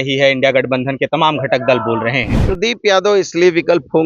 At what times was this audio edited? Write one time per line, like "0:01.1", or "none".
0:02.4